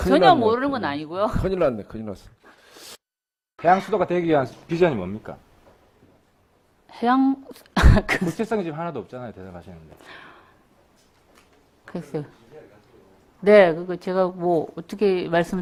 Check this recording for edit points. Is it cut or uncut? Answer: uncut